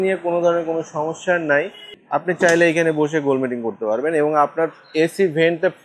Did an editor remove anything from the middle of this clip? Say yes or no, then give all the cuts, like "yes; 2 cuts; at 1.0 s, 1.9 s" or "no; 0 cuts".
yes; 1 cut; at 1.8 s